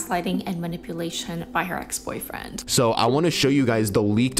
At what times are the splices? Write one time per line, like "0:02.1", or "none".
0:02.5